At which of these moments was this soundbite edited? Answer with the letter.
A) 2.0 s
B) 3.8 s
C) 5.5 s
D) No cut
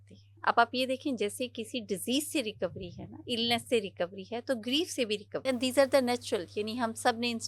C